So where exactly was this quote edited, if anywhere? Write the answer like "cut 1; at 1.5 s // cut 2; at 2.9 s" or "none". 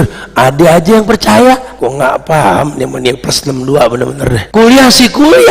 cut 1; at 1.7 s // cut 2; at 4.4 s